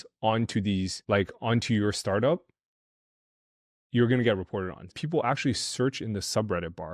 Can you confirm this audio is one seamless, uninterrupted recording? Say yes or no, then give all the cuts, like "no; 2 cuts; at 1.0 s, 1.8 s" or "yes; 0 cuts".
no; 2 cuts; at 1.0 s, 4.9 s